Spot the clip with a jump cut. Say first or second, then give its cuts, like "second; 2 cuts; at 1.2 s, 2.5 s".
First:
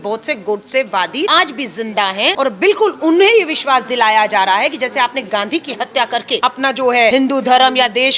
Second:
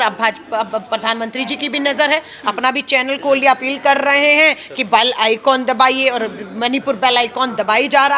first; 4 cuts; at 1.3 s, 2.3 s, 6.4 s, 7.1 s